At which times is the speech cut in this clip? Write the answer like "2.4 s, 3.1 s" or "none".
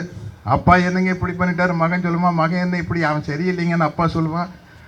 none

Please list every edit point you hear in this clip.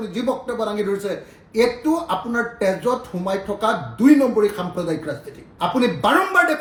none

